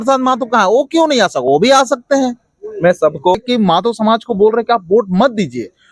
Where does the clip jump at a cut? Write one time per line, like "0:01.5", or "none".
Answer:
0:03.4